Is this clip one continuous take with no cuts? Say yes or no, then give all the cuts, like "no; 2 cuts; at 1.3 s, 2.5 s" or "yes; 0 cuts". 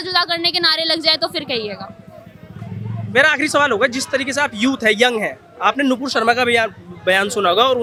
yes; 0 cuts